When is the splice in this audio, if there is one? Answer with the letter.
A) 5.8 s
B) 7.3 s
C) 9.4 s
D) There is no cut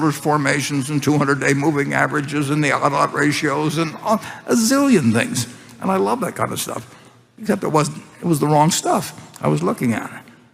D